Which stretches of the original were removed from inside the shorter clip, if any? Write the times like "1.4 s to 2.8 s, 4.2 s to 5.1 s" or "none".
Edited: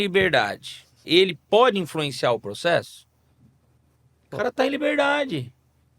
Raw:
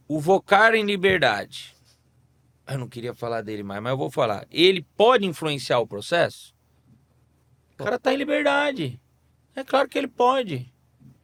1.8 s to 4.4 s